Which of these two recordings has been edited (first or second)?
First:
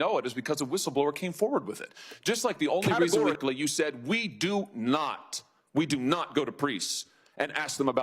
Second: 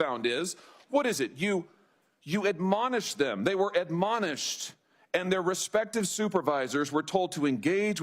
first